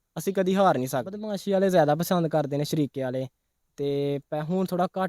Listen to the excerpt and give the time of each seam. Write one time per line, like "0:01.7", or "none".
0:01.3